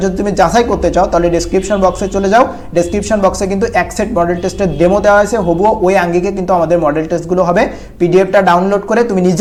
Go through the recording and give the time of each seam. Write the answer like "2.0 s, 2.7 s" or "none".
none